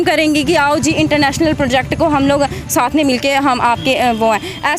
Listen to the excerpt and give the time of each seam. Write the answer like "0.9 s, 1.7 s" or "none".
none